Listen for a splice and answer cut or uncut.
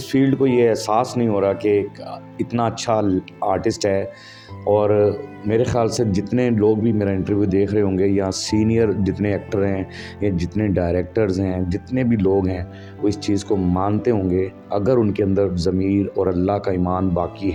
uncut